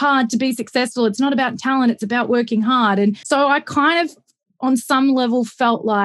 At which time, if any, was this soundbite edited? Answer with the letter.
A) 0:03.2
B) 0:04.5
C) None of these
A